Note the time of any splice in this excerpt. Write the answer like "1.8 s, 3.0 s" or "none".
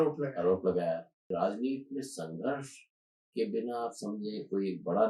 1.3 s